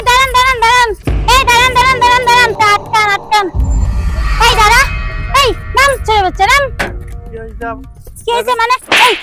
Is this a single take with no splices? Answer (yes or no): no